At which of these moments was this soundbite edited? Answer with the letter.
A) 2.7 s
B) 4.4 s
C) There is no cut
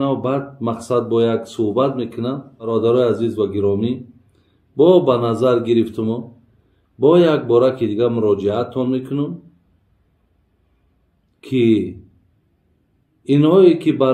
A